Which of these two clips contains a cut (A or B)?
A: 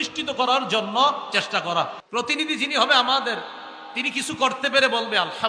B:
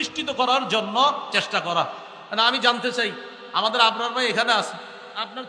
A